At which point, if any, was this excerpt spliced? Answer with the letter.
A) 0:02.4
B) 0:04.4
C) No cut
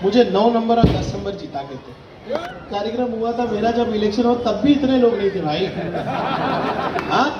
A